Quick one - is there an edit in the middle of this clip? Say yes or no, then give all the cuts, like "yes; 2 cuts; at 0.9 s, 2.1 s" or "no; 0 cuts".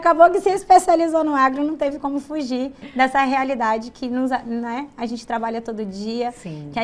no; 0 cuts